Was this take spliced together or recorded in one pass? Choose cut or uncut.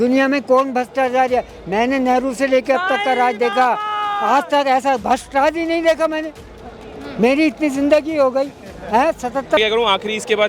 cut